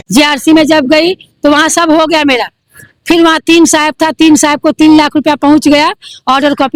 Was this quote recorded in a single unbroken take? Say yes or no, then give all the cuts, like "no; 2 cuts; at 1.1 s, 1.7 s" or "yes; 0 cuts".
yes; 0 cuts